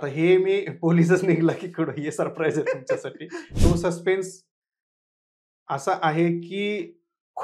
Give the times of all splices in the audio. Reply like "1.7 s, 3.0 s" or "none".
3.5 s